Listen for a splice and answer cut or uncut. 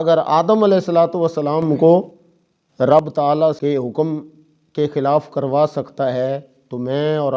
cut